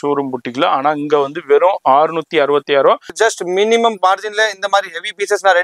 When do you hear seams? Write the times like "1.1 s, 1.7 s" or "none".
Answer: 3.1 s